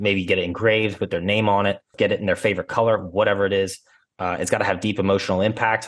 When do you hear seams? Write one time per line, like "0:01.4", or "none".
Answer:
0:01.9